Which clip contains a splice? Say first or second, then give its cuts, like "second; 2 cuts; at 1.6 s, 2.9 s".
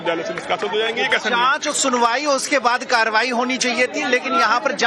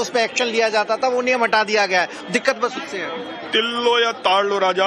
first; 1 cut; at 3.2 s